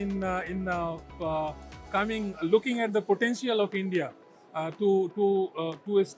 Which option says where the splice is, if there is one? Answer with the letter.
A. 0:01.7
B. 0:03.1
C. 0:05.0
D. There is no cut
D